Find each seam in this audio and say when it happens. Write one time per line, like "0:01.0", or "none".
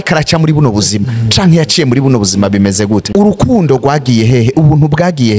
0:03.1